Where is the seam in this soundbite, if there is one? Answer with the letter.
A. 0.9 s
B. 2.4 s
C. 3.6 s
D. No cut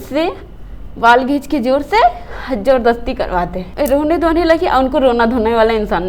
C